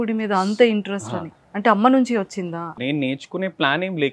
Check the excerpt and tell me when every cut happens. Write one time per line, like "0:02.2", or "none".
0:02.8